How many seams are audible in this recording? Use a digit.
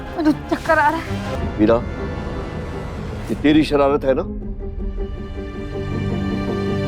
1